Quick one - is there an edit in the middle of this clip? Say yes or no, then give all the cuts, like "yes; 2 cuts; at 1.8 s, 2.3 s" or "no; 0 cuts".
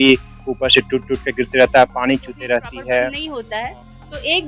yes; 1 cut; at 3.3 s